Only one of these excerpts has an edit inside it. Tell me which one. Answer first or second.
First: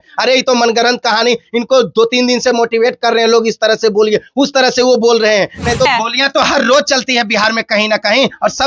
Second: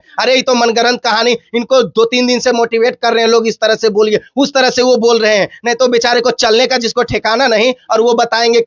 first